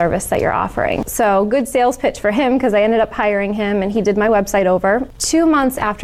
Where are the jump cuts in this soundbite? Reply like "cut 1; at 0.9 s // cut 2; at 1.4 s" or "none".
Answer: cut 1; at 1.0 s // cut 2; at 5.1 s